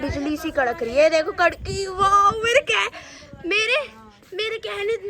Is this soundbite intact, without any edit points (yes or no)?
yes